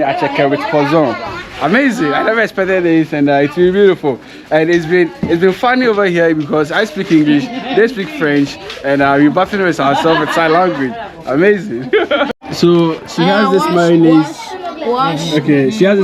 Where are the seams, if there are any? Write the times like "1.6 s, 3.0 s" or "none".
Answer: none